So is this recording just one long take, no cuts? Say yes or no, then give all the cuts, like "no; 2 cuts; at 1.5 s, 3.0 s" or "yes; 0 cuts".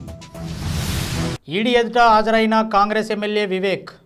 yes; 0 cuts